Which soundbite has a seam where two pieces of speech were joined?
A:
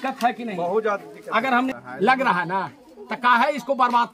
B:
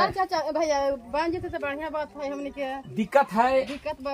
A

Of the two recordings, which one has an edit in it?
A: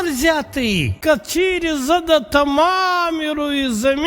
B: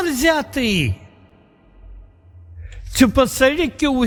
A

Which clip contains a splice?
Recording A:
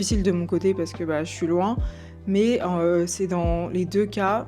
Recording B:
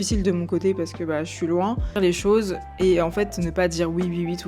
B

